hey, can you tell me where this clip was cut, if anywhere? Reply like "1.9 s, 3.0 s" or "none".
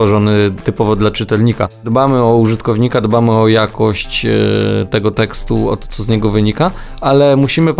1.9 s